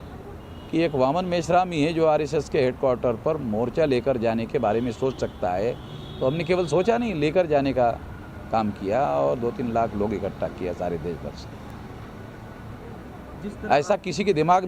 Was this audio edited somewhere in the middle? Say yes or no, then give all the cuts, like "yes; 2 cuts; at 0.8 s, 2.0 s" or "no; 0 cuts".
no; 0 cuts